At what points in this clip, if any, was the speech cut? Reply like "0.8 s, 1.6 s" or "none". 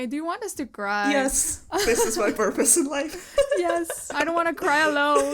4.1 s